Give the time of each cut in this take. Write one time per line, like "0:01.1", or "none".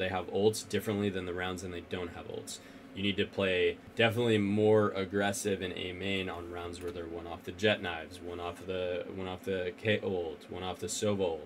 0:03.8